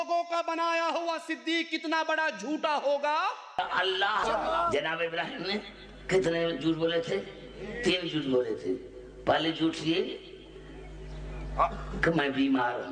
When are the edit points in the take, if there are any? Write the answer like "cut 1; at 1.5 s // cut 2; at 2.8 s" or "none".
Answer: cut 1; at 4.2 s